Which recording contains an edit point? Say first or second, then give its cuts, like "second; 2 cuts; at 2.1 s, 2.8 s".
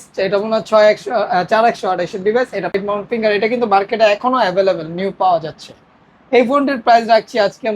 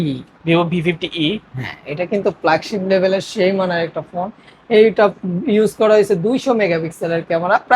first; 1 cut; at 2.8 s